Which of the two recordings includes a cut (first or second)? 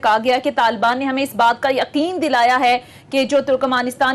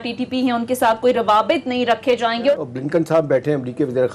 second